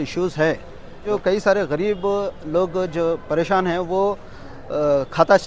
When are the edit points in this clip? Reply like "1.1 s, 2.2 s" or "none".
1.0 s